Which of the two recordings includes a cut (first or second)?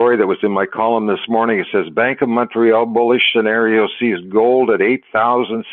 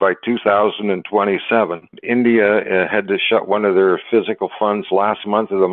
second